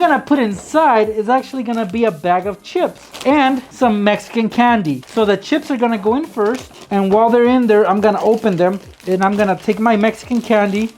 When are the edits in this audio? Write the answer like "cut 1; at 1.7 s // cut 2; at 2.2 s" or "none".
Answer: cut 1; at 3.7 s // cut 2; at 5.0 s // cut 3; at 6.7 s // cut 4; at 8.9 s